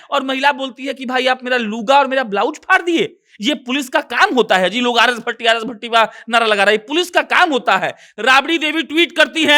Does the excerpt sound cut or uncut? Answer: cut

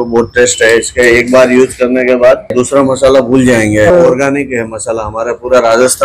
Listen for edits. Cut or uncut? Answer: cut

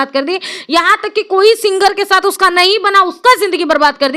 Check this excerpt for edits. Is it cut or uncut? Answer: uncut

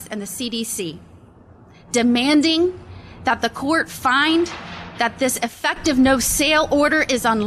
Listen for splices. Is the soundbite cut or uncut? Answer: uncut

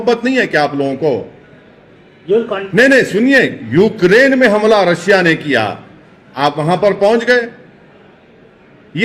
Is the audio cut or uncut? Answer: uncut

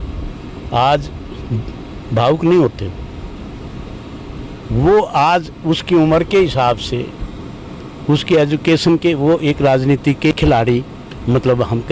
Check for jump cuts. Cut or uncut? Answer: uncut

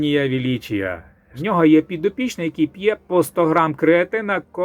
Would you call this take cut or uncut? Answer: cut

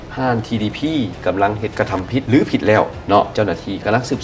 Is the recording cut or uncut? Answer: cut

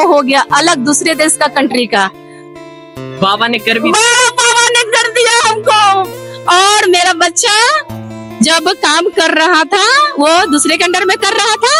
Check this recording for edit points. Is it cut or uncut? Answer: uncut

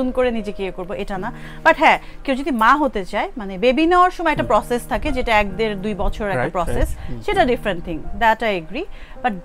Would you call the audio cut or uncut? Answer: uncut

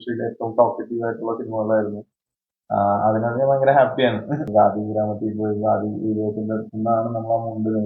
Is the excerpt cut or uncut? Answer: cut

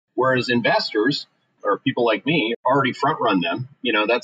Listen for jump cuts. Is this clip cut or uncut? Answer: cut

